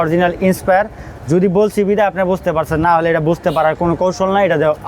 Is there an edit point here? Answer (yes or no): no